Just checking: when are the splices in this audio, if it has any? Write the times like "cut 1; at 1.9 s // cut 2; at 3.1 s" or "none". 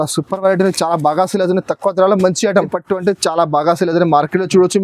cut 1; at 2.8 s